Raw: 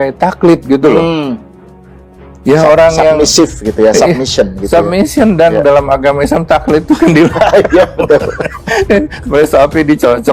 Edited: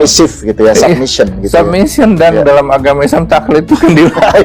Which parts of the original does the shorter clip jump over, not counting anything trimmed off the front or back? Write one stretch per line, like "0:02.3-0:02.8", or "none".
none